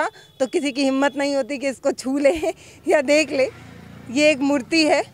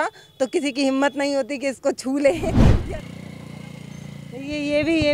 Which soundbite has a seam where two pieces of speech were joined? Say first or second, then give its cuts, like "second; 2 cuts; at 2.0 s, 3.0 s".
second; 1 cut; at 2.7 s